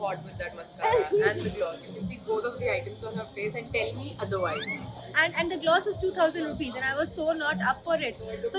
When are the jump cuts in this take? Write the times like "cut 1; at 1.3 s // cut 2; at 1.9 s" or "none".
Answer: none

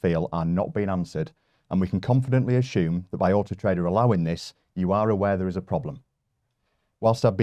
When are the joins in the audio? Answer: none

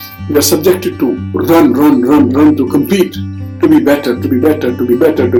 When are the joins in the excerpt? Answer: none

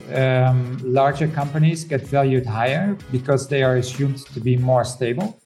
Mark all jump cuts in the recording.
none

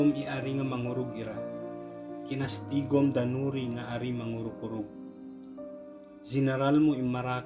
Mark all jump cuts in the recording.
cut 1; at 1.2 s // cut 2; at 2.3 s

